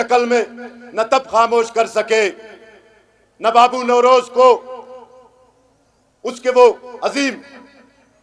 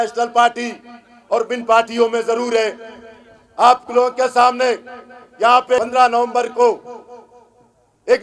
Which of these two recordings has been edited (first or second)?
second